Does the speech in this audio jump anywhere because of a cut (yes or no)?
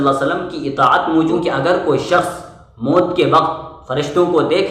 yes